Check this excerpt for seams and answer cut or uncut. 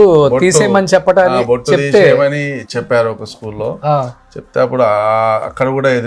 uncut